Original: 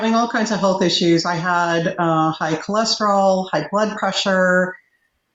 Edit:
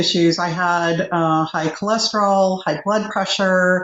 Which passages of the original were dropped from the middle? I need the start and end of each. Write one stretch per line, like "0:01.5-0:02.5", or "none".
none